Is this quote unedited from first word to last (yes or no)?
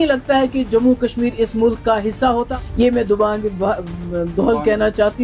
no